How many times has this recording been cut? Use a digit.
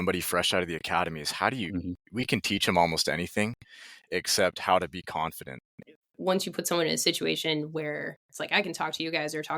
1